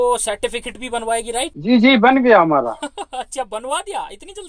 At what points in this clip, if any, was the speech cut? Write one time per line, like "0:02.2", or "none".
none